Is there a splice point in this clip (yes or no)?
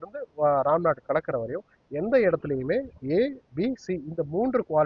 no